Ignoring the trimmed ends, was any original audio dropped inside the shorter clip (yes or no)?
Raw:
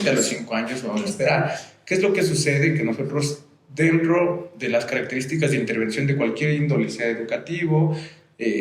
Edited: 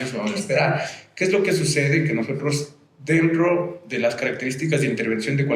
no